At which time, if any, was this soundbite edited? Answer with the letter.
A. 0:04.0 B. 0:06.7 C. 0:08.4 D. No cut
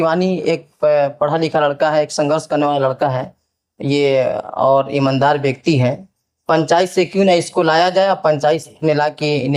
D